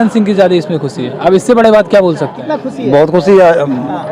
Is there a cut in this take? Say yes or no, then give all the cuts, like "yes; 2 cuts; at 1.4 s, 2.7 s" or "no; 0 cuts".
yes; 1 cut; at 2.4 s